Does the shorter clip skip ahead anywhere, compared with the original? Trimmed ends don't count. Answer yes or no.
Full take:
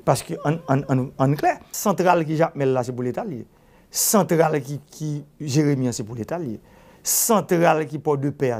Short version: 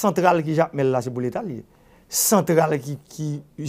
no